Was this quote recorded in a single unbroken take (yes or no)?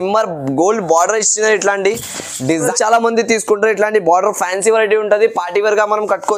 no